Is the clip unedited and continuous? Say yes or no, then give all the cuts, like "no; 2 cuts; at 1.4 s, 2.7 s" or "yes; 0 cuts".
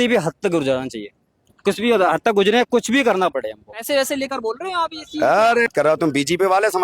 no; 2 cuts; at 3.8 s, 5.8 s